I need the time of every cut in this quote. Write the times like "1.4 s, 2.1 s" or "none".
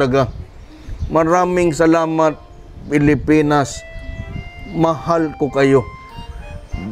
none